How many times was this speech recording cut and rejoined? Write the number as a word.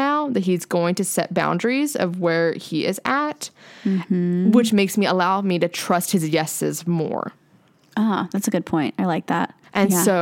zero